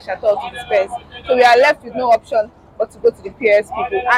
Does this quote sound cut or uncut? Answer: uncut